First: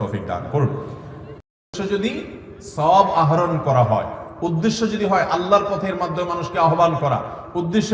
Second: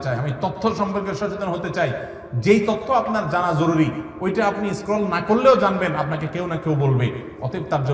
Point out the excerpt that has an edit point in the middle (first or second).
first